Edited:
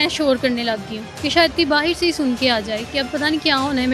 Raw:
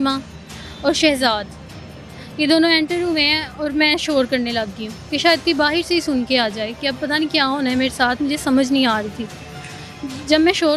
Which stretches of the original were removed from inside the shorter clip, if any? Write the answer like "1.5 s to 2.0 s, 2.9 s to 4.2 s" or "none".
none